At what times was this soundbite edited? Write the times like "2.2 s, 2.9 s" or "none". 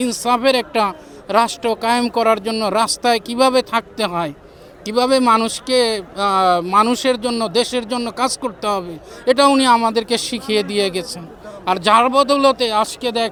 none